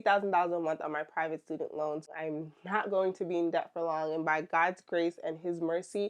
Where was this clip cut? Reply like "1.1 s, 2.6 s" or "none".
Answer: 2.1 s